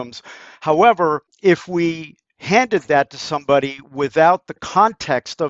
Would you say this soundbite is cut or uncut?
cut